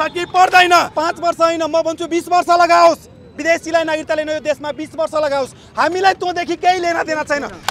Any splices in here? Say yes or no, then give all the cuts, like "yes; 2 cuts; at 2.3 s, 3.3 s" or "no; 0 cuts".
yes; 1 cut; at 0.9 s